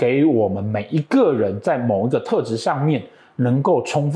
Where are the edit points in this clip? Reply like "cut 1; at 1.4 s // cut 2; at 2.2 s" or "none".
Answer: none

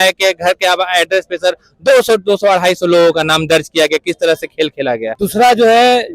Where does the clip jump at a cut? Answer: cut 1; at 5.1 s

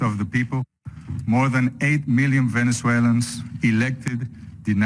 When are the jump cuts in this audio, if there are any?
none

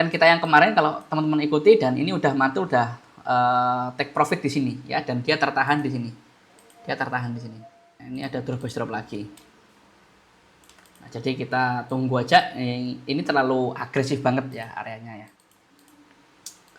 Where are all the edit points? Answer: cut 1; at 7.9 s // cut 2; at 15.4 s

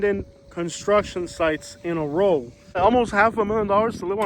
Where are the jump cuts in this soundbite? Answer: cut 1; at 2.8 s

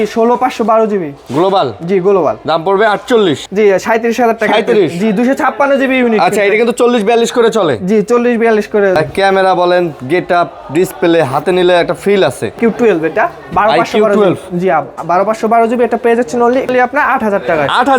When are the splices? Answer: cut 1; at 3.4 s // cut 2; at 9.0 s // cut 3; at 12.6 s // cut 4; at 16.7 s

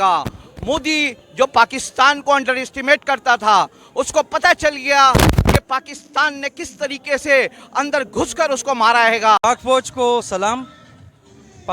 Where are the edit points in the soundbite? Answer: cut 1; at 9.4 s

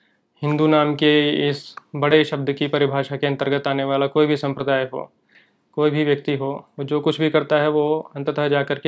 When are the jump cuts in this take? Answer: none

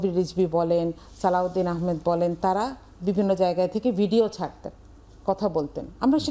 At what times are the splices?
none

